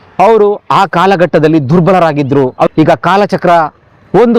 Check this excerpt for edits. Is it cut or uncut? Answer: cut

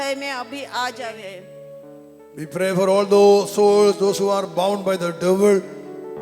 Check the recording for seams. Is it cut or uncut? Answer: cut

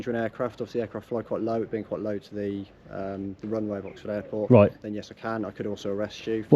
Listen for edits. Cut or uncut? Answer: uncut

